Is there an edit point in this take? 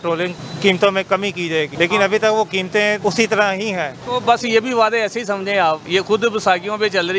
yes; 4 cuts; at 1.7 s, 3.0 s, 4.0 s, 5.8 s

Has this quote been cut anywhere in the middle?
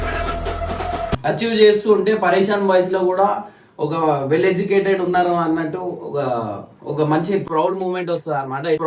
yes; 1 cut; at 1.1 s

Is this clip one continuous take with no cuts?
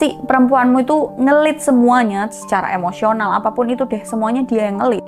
yes; 0 cuts

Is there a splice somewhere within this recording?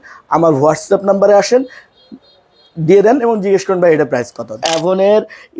yes; 1 cut; at 4.6 s

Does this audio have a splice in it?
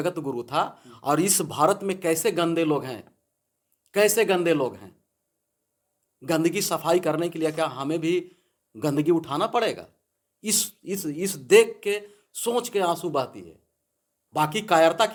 no; 0 cuts

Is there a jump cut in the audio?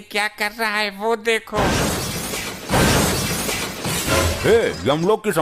no; 0 cuts

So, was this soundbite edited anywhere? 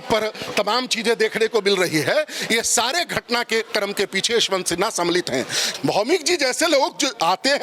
yes; 1 cut; at 5.7 s

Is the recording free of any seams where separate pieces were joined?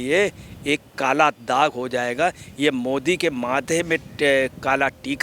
yes; 0 cuts

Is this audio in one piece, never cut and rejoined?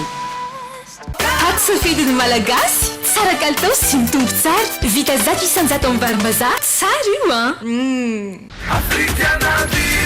no; 2 cuts; at 1.0 s, 8.5 s

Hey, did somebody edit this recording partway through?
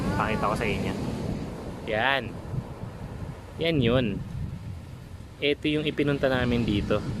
yes; 1 cut; at 1.5 s

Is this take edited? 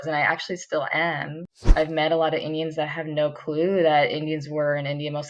yes; 1 cut; at 1.6 s

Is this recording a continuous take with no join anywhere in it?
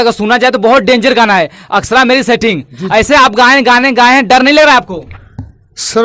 yes; 0 cuts

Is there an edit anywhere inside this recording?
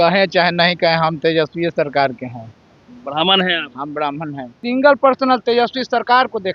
yes; 1 cut; at 4.6 s

